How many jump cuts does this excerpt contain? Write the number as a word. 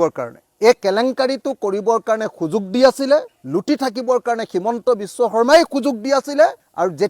zero